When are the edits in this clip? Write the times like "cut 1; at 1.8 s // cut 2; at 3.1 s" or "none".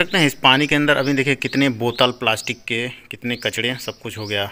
none

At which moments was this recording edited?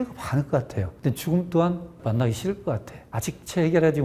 none

